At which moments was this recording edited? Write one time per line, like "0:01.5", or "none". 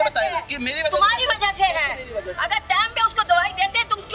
none